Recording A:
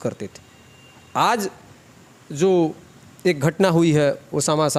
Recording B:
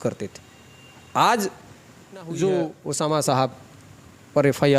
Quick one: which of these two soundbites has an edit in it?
B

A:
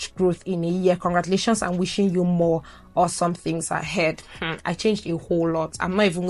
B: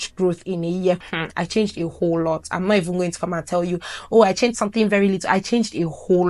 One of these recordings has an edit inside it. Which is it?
B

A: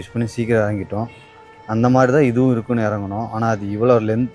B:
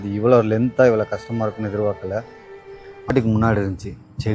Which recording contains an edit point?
B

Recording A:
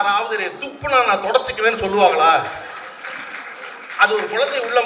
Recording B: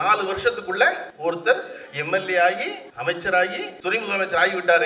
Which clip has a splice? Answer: B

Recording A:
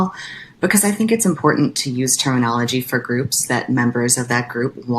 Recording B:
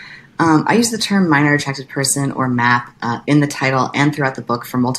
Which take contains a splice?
A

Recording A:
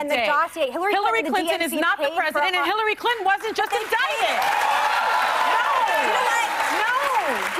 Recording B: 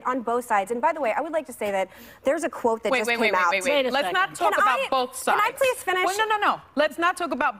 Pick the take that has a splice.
B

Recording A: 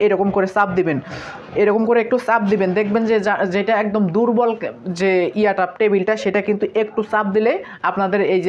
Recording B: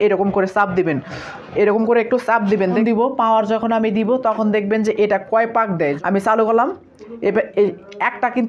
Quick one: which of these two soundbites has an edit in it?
B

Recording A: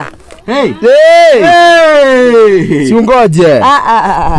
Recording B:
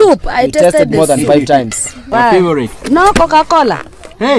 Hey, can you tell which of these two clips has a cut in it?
B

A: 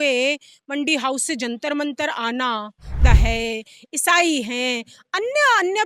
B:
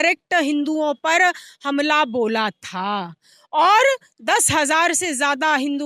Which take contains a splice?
A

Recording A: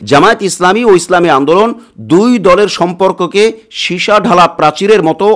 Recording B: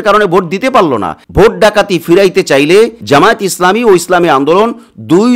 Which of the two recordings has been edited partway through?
B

